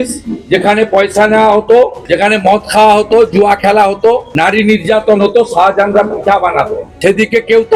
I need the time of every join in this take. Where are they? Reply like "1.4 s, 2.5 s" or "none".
2.0 s, 4.3 s, 6.8 s